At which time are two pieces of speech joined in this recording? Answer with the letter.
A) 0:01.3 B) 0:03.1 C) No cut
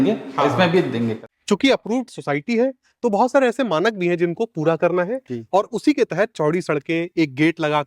A